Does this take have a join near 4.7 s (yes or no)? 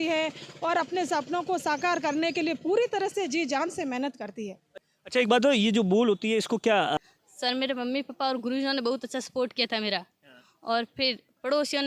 yes